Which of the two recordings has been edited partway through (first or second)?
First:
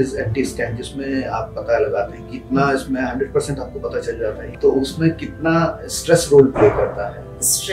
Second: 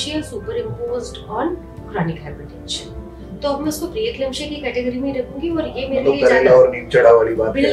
first